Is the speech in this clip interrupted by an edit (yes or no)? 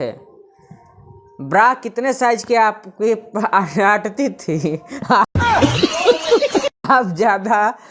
yes